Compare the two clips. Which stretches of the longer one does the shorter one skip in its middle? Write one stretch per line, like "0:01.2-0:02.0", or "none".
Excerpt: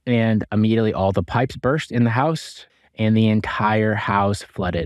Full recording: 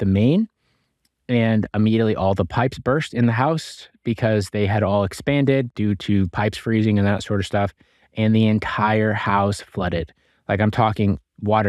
0:03.9-0:07.8